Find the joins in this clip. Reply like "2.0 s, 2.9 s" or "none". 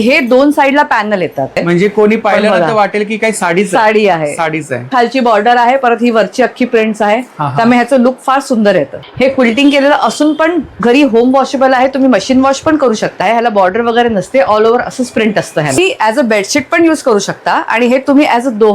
1.6 s, 4.9 s, 9.0 s, 13.2 s, 15.8 s